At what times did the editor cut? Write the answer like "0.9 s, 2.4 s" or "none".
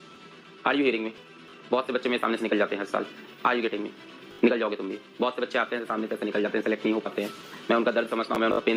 none